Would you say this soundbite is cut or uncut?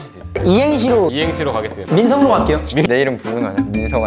cut